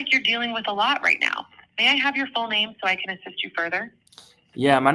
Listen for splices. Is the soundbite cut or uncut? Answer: uncut